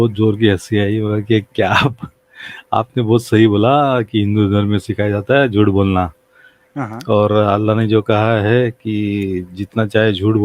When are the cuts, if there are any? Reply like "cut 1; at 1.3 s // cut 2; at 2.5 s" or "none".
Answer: none